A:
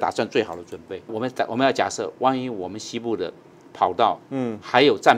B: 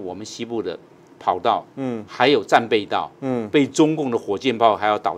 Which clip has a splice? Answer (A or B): A